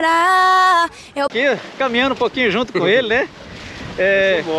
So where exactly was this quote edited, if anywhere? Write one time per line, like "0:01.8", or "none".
0:01.3